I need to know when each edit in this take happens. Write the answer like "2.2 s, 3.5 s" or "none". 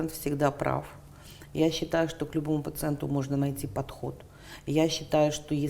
none